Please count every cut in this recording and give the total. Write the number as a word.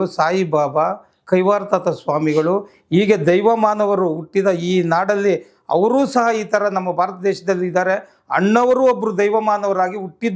zero